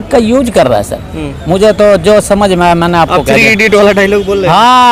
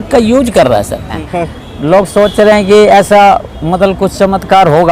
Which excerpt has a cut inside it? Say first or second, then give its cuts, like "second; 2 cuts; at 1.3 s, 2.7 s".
second; 1 cut; at 1.3 s